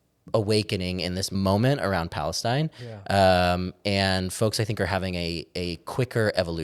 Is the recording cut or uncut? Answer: cut